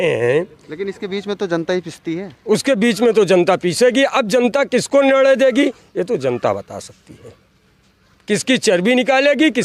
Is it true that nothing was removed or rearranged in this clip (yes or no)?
yes